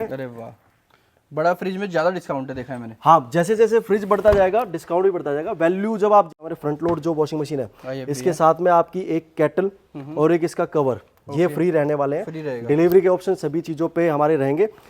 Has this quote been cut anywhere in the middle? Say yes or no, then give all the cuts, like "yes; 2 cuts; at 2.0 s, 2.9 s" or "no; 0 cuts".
yes; 1 cut; at 6.3 s